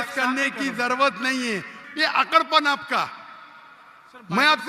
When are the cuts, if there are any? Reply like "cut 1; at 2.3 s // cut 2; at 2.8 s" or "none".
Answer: cut 1; at 1.8 s